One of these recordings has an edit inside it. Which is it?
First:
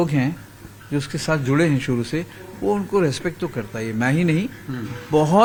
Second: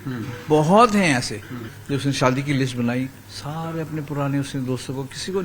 second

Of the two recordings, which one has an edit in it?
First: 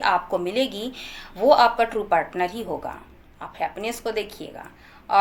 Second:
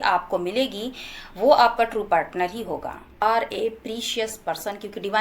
second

